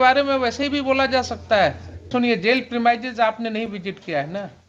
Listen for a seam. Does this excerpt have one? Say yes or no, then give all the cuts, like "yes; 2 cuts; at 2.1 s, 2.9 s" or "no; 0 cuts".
yes; 1 cut; at 2.1 s